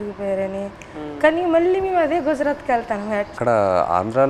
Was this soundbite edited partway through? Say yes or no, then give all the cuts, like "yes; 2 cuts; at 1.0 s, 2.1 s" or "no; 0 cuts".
yes; 1 cut; at 3.3 s